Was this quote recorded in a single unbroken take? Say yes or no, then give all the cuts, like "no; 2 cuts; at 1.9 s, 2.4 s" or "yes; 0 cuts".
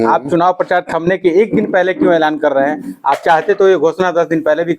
yes; 0 cuts